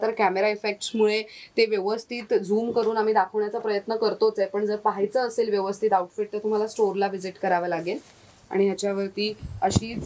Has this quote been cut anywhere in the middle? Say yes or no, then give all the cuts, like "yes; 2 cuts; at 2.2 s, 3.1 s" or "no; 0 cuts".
no; 0 cuts